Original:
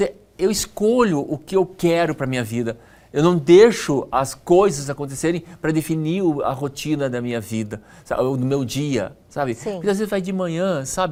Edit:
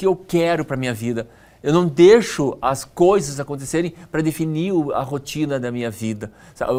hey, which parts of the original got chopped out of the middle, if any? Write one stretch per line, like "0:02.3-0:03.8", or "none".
none